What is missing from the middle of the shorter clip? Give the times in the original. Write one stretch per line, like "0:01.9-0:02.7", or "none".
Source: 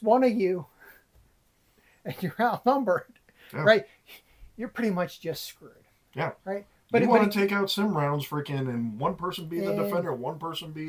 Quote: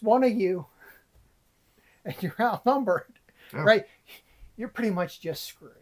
none